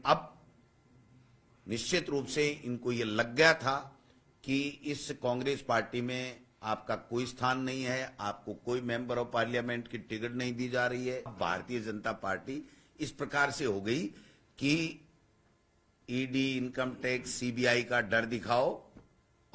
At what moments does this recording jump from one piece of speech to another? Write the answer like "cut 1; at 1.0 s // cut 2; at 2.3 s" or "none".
cut 1; at 11.3 s